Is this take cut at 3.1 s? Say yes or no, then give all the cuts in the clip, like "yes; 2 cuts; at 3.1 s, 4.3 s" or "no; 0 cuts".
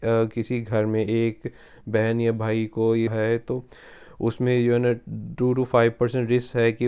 yes; 1 cut; at 3.1 s